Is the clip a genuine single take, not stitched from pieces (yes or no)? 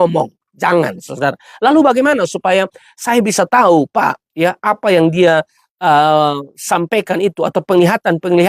yes